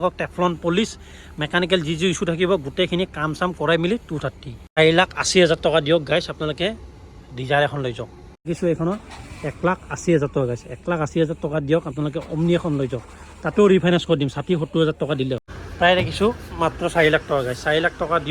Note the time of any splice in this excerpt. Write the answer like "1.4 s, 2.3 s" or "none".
4.8 s, 8.5 s, 15.6 s